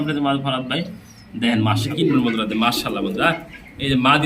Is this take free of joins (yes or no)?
no